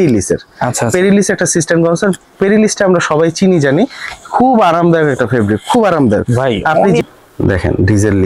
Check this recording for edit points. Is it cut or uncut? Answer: cut